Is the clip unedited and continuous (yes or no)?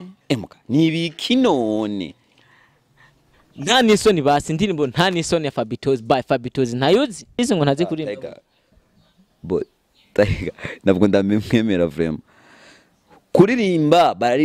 no